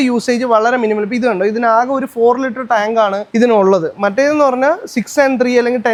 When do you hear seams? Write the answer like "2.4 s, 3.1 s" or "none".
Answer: none